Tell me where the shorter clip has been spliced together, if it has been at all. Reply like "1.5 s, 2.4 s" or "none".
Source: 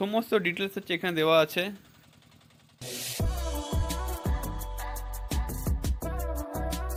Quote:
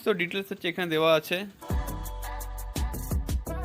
1.6 s

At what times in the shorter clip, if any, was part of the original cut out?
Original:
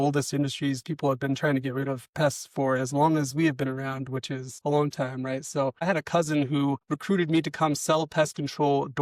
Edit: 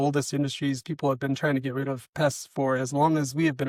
none

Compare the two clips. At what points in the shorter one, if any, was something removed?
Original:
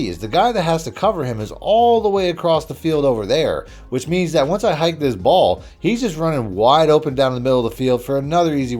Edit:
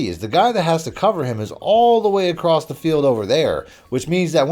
none

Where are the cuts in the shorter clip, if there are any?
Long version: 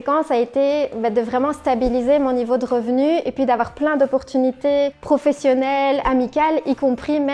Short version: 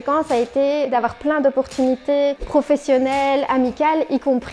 0.9 s

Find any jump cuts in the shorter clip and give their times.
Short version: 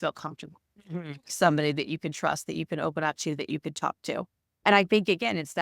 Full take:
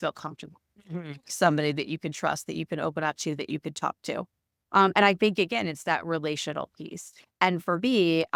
4.6 s

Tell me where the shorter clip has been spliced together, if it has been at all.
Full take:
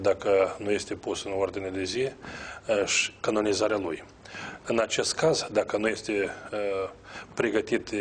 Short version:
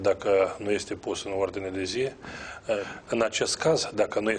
2.9 s

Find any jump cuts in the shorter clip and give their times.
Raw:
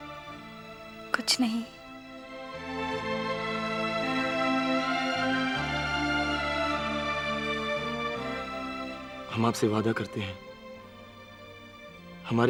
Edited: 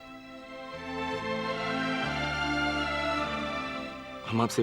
1.8 s, 3.6 s

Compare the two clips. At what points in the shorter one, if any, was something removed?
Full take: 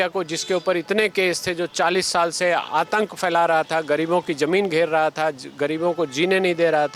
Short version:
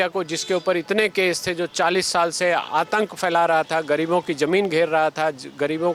none

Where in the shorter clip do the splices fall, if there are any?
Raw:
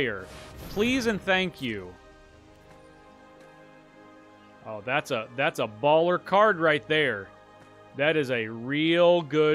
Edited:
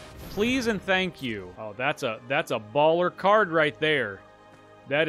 1.5 s

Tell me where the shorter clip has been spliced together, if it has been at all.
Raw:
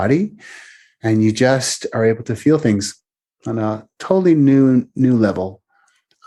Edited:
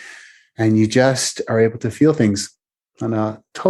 none

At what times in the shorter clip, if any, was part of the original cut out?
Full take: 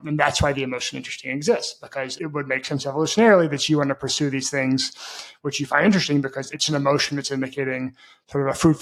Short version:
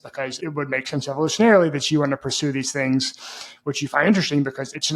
none

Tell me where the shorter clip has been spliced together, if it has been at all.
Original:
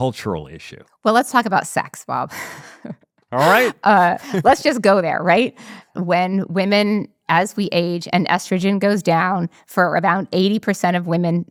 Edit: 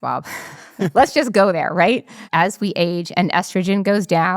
0.9 s, 2.2 s

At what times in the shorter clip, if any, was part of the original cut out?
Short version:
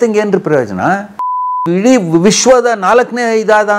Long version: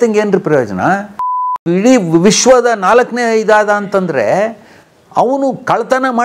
none

